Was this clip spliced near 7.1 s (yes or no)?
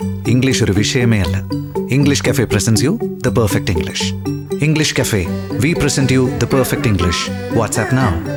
no